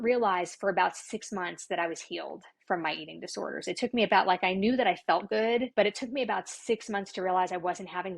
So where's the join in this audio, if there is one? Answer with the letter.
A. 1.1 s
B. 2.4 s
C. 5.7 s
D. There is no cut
C